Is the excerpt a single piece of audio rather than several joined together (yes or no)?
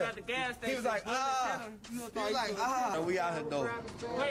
yes